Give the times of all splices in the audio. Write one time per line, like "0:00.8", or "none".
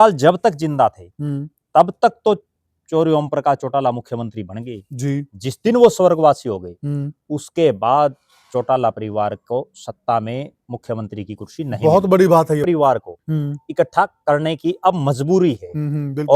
0:12.6